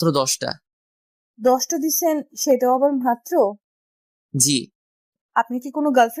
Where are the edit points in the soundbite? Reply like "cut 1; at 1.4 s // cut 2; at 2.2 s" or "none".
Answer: cut 1; at 5.2 s

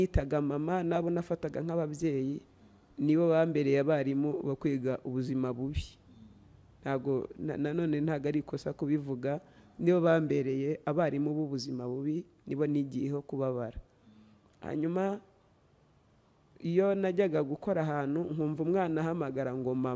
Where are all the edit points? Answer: none

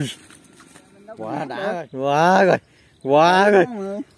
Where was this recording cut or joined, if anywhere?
cut 1; at 1.6 s

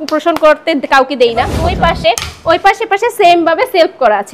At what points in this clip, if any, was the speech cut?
cut 1; at 1.6 s

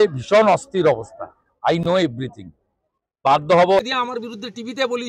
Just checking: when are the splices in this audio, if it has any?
cut 1; at 3.8 s

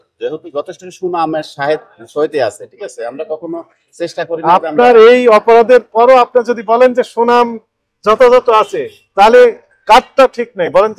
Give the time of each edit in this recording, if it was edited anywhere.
none

